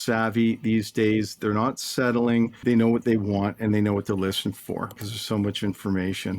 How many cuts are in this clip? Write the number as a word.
two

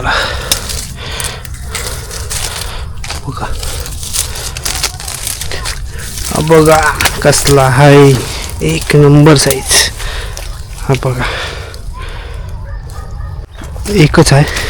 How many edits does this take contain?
one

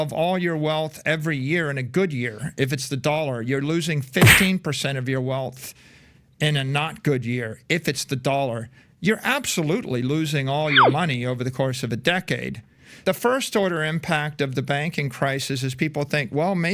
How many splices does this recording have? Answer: one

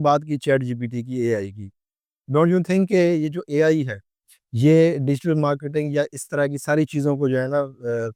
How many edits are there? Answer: zero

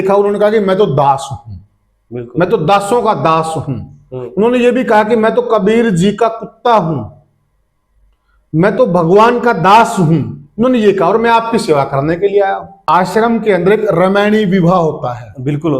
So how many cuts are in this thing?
one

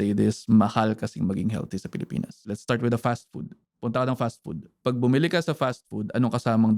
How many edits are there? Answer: one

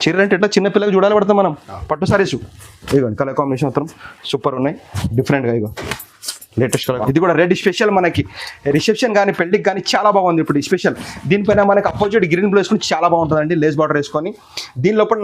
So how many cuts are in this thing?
one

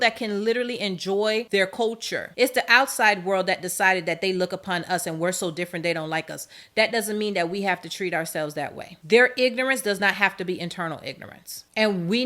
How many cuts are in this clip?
one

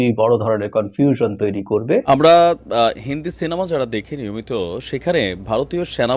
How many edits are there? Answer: one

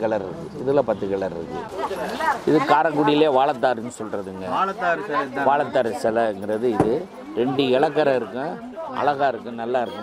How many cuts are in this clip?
one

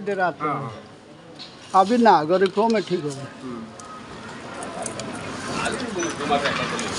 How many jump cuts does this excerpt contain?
zero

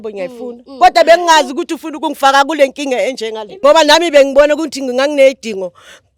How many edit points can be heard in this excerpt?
one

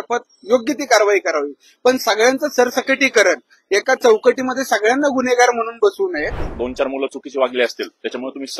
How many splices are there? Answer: one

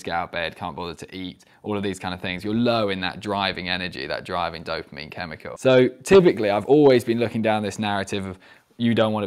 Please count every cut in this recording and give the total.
one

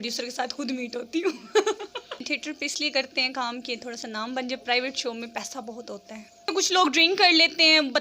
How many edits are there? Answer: two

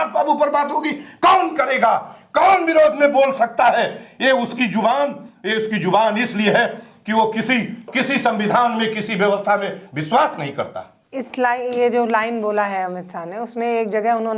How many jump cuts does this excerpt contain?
zero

